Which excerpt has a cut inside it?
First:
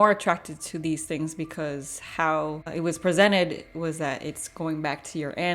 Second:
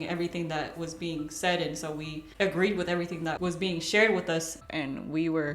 second; 2 cuts; at 2.2 s, 4.6 s

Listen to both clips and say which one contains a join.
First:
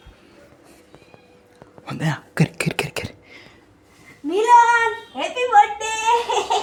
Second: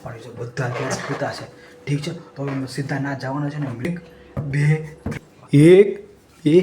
second; 2 cuts; at 3.8 s, 5.1 s

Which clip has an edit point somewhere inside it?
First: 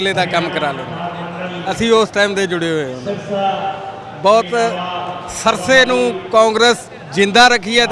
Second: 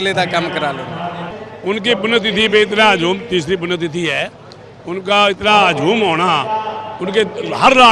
second; 1 cut; at 1.3 s

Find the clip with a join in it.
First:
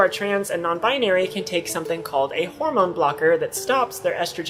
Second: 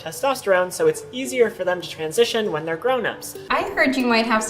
second; 1 cut; at 3.4 s

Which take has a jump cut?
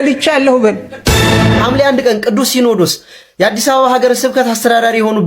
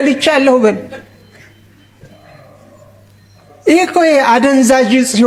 first; 1 cut; at 1.4 s

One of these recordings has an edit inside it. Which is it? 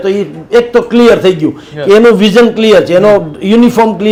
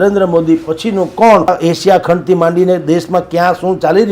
second; 1 cut; at 1.5 s

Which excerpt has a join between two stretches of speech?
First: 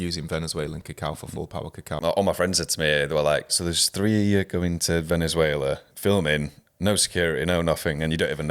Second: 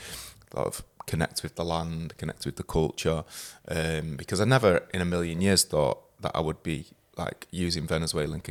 first; 3 cuts; at 1.9 s, 3.5 s, 5.9 s

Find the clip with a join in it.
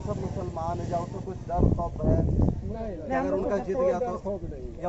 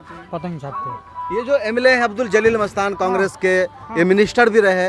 first; 1 cut; at 1.2 s

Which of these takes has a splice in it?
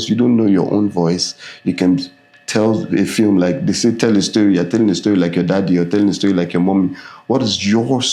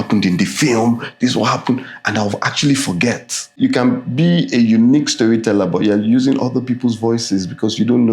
second; 1 cut; at 3.6 s

